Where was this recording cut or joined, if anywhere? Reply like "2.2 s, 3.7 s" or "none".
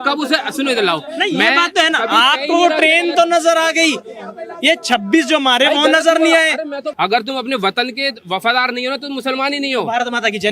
6.9 s